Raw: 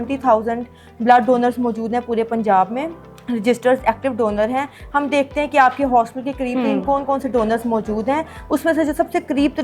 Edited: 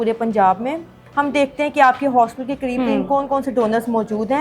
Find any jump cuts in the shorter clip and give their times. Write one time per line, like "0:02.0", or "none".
0:01.0